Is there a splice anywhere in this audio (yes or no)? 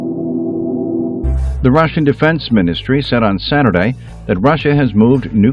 yes